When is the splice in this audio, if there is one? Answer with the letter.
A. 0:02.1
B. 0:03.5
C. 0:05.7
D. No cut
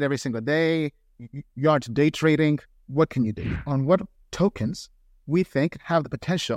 B